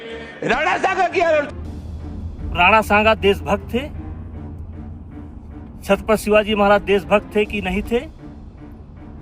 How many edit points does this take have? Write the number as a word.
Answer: one